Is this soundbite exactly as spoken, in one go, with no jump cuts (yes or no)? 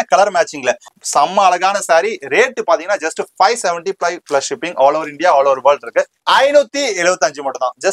no